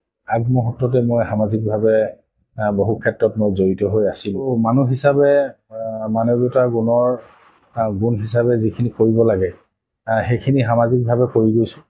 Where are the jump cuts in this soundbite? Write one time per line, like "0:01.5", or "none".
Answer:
0:04.5